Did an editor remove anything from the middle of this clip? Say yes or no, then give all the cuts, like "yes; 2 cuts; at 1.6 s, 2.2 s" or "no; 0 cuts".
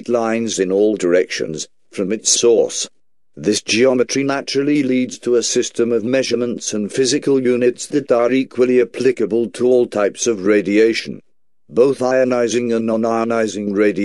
no; 0 cuts